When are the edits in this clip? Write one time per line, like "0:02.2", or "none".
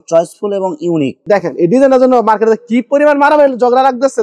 0:01.2